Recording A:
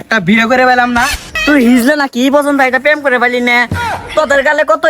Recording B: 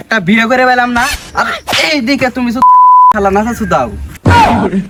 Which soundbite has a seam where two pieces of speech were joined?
A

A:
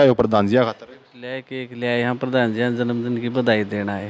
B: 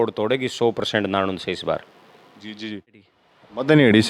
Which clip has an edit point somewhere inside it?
B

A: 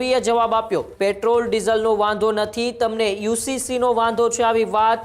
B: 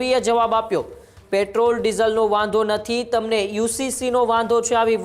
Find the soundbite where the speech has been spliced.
A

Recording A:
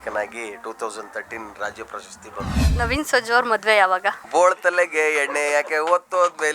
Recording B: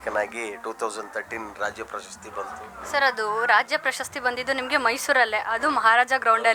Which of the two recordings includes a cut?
A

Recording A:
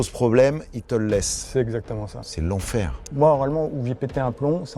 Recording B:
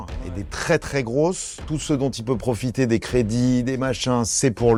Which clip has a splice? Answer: A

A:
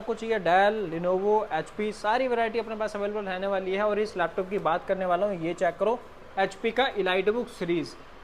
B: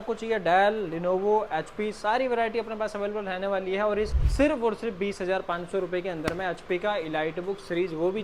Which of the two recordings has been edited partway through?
B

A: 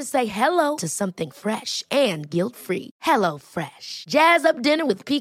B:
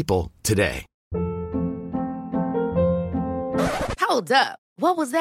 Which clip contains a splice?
B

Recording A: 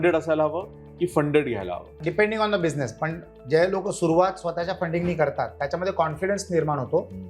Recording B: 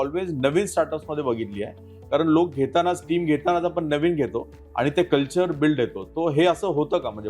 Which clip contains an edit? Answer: A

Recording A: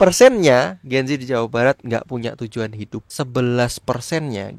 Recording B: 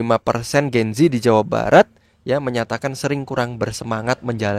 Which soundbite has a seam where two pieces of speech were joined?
A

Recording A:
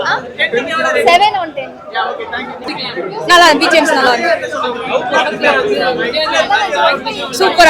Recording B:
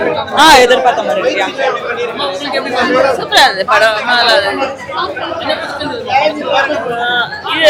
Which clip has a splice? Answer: A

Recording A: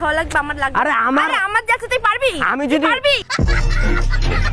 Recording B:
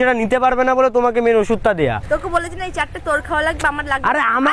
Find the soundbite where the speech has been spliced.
B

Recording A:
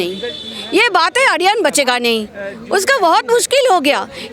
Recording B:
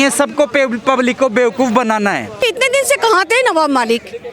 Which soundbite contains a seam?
B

